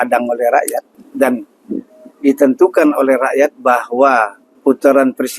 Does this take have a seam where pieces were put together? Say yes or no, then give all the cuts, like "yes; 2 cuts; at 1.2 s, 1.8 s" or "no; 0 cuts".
yes; 2 cuts; at 1.0 s, 4.4 s